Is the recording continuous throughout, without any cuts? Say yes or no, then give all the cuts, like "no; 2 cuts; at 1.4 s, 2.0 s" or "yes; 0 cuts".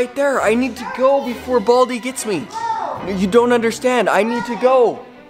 yes; 0 cuts